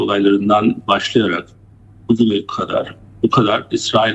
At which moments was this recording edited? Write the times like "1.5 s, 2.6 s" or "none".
none